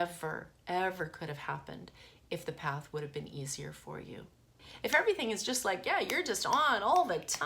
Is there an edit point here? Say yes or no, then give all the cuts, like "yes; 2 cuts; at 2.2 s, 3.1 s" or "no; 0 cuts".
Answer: yes; 1 cut; at 4.6 s